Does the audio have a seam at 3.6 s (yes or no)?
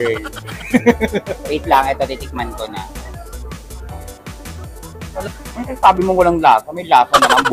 no